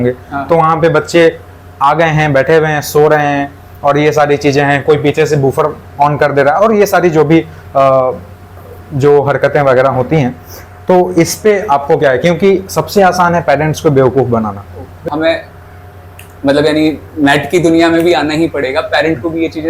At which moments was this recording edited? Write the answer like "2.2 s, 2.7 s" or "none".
15.0 s